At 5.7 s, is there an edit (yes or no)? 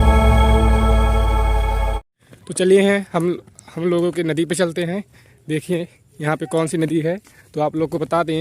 no